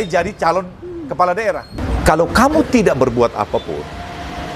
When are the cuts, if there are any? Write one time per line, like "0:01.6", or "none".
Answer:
0:01.8